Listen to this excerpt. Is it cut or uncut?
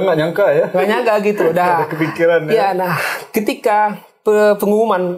uncut